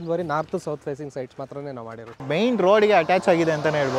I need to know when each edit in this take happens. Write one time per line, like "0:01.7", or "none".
0:02.3